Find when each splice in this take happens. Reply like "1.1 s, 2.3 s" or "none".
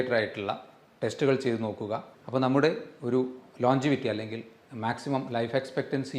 2.1 s